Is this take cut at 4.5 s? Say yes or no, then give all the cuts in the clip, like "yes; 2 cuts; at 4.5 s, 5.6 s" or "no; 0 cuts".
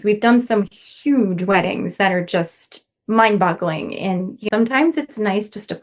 yes; 1 cut; at 4.5 s